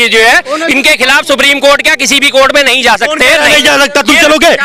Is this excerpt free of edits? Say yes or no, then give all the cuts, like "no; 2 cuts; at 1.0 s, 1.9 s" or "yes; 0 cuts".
yes; 0 cuts